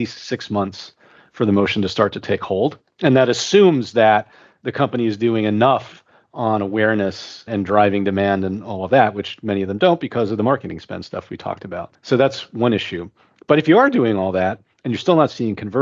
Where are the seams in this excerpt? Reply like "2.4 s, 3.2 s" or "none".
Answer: none